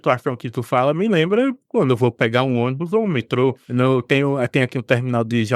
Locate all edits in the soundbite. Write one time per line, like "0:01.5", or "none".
0:03.6

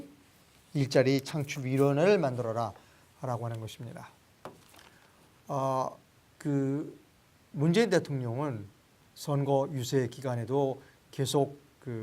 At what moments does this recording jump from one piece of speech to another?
0:07.7

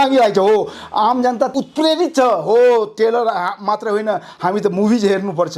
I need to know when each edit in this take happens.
0:01.5

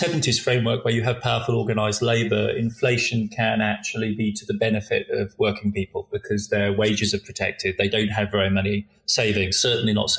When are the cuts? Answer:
none

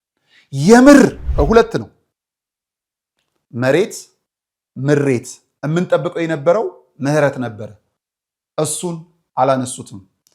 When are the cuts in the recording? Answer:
0:01.2

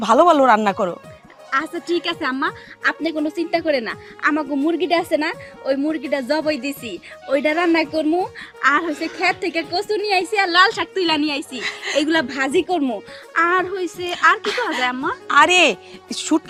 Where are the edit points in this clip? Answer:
none

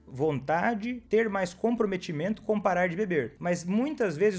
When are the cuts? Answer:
0:01.0
0:03.3

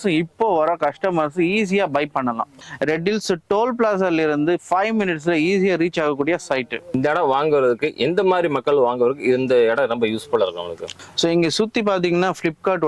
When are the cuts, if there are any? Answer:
0:02.6
0:06.8
0:10.8

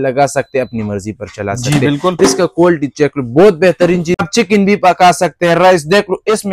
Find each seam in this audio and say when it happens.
0:04.2

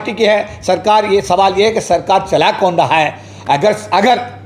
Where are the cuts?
none

